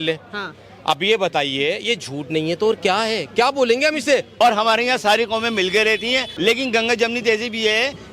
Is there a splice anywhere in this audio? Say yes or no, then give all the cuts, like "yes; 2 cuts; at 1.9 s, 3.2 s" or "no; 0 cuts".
yes; 2 cuts; at 4.3 s, 6.3 s